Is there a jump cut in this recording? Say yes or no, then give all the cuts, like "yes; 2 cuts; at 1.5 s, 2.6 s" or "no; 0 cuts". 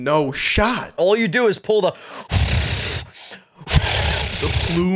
yes; 1 cut; at 1.0 s